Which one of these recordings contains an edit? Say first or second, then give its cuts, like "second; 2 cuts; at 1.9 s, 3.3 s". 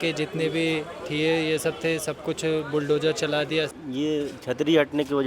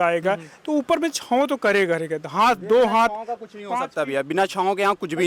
first; 1 cut; at 3.8 s